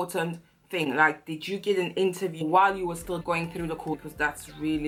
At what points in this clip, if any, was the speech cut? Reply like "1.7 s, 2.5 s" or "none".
none